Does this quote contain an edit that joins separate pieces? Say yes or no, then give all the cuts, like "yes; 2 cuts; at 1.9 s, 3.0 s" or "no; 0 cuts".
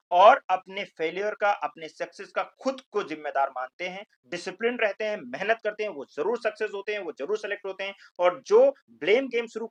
no; 0 cuts